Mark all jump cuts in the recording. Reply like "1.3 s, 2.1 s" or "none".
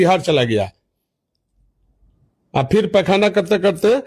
none